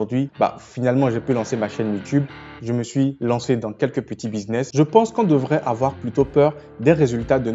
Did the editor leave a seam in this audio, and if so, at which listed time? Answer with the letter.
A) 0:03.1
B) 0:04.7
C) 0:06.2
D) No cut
B